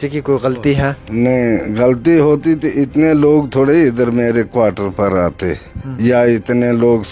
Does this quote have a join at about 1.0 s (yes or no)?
no